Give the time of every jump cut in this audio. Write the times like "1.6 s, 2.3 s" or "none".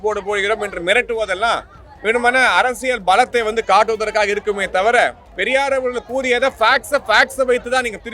5.3 s